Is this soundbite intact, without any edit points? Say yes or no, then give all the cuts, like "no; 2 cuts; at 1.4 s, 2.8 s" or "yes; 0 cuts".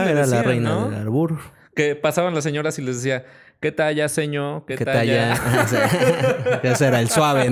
yes; 0 cuts